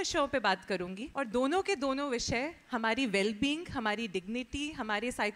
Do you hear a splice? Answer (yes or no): yes